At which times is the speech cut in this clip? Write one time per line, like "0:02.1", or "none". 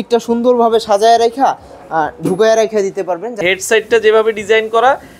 0:03.4